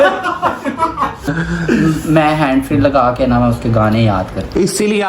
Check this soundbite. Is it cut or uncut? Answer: cut